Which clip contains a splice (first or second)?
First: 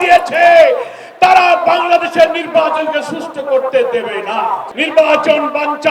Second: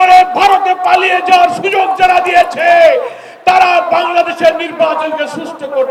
first